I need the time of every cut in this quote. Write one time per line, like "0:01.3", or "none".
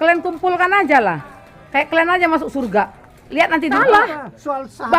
0:03.7